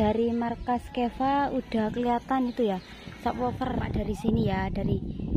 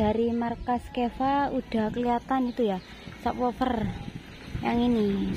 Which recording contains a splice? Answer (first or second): first